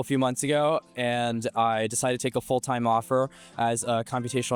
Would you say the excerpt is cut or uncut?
uncut